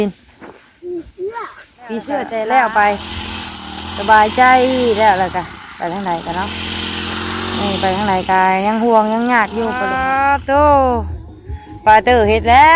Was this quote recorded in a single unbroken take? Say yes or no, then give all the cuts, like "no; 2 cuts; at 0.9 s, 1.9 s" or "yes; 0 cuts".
no; 2 cuts; at 2.4 s, 9.9 s